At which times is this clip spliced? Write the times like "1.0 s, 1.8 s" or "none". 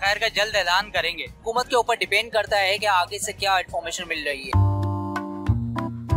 1.4 s, 4.6 s